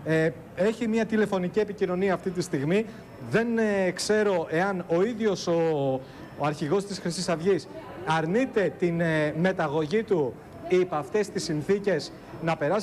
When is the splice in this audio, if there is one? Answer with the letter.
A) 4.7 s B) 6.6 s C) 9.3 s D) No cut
C